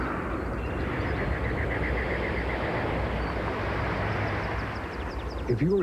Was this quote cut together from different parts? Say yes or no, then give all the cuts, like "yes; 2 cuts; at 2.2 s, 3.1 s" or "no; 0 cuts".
yes; 1 cut; at 1.4 s